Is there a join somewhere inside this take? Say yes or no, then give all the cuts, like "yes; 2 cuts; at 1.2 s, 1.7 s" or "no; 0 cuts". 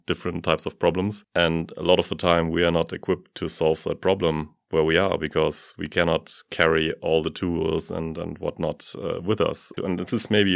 no; 0 cuts